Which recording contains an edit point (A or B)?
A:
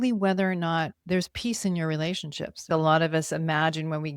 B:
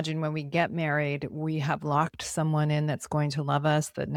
A